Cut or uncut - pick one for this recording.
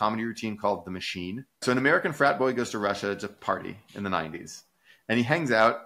cut